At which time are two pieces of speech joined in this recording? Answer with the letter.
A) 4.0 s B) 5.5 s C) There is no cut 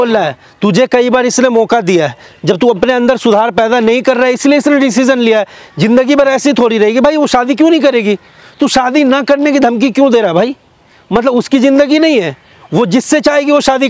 C